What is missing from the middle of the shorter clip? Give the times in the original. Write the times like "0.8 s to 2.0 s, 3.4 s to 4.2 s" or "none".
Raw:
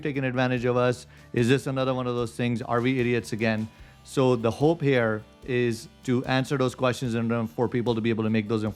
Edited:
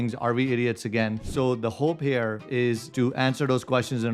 3.7 s to 4.0 s, 5.5 s to 5.8 s